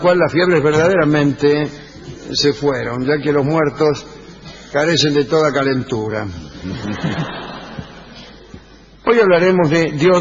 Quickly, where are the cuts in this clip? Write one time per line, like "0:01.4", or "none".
none